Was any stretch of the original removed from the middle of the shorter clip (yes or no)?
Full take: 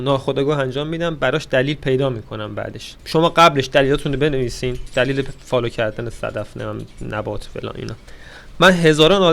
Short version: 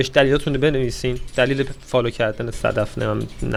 no